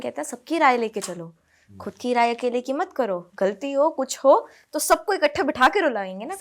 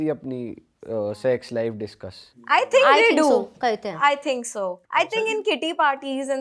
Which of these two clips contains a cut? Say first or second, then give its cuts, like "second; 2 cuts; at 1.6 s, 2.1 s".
second; 2 cuts; at 2.4 s, 4.8 s